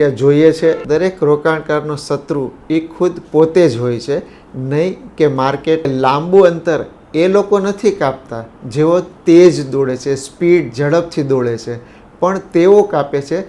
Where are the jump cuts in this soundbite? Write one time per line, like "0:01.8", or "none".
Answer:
0:00.8
0:05.9